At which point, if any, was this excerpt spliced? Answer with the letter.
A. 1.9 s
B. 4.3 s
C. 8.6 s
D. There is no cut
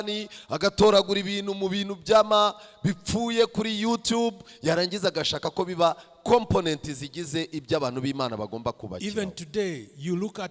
D